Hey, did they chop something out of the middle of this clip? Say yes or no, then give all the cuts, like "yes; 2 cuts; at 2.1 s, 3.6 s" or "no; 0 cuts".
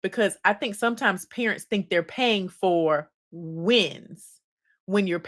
no; 0 cuts